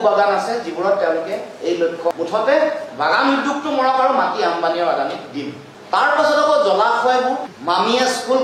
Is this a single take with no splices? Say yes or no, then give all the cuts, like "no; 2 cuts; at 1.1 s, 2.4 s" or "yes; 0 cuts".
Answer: no; 3 cuts; at 2.1 s, 5.7 s, 7.5 s